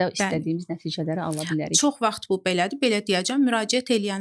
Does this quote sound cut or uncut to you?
uncut